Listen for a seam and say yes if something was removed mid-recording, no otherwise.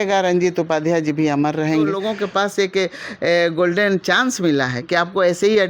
yes